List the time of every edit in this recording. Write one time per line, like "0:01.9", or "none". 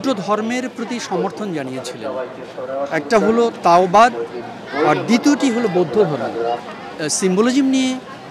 0:06.7

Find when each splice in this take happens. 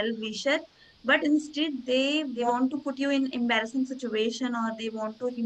0:02.5

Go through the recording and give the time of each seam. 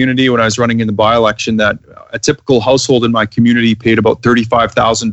none

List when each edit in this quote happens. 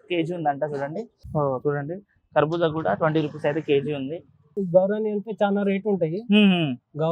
0:01.2
0:04.6

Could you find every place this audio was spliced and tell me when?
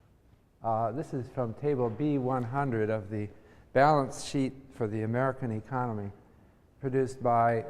0:04.8

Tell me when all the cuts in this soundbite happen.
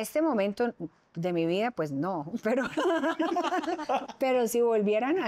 0:04.1

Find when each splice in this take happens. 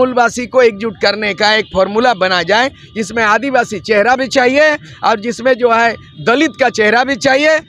none

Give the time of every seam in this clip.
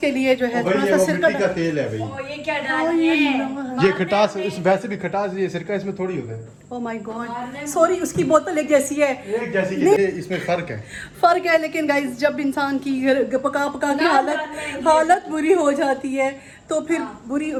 none

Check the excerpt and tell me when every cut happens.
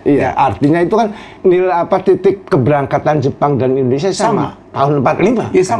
0:01.2
0:04.6

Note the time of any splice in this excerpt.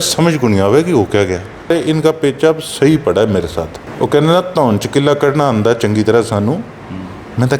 0:01.7
0:03.8

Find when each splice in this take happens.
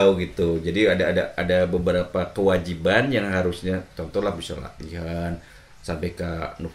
none

